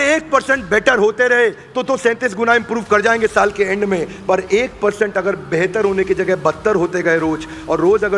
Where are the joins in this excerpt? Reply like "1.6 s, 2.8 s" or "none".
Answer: none

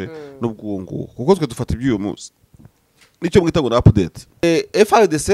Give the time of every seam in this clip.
4.4 s

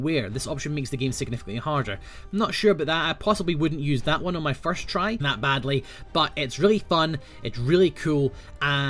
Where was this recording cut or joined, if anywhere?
none

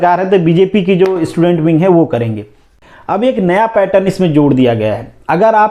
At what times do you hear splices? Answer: 2.6 s

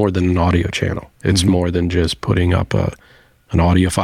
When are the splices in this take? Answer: 1.1 s

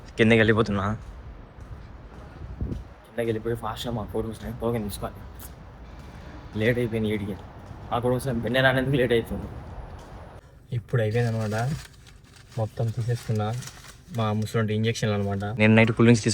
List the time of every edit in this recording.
10.4 s, 15.6 s

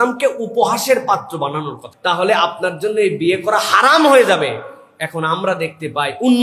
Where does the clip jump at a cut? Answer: 1.8 s

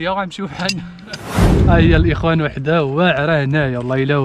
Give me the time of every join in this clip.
1.5 s

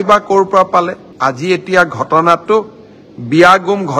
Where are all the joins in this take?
1.0 s

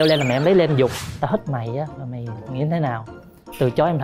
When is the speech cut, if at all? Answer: 1.1 s

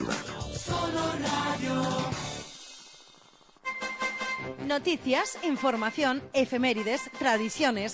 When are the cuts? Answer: 3.6 s

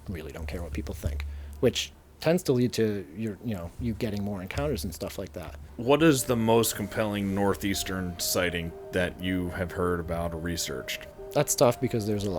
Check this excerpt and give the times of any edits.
5.6 s, 11.1 s

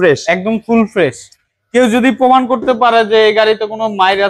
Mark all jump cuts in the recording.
none

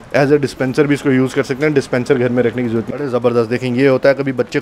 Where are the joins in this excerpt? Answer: 2.9 s

